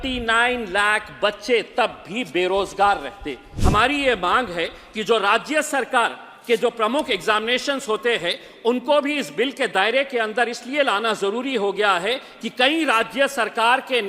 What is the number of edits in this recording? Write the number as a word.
one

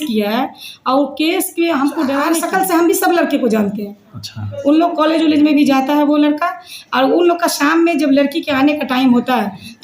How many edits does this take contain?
one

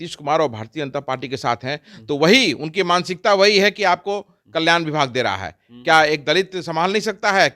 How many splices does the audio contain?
zero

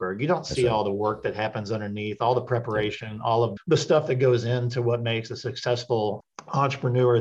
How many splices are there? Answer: one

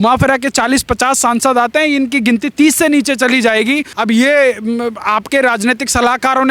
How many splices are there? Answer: one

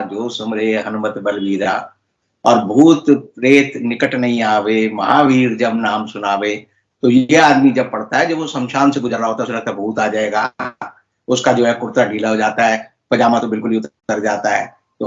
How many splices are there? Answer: zero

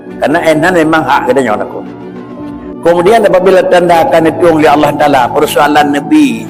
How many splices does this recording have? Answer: zero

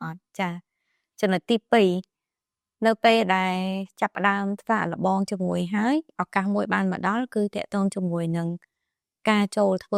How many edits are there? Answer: zero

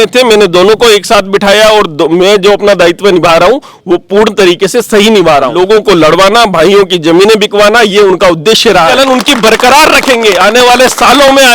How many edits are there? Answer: two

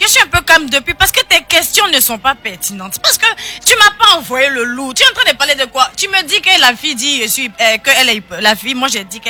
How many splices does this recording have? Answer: zero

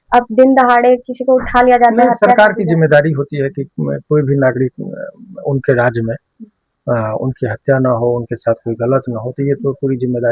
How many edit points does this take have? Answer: zero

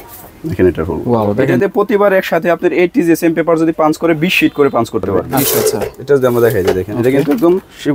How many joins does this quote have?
two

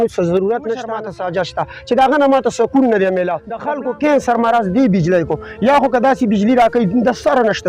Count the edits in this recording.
two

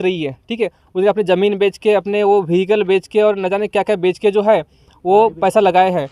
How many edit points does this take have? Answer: zero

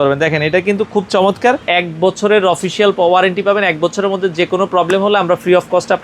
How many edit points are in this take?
one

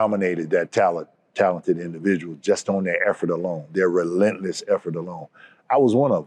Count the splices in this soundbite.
zero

